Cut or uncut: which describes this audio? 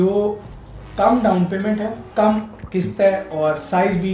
cut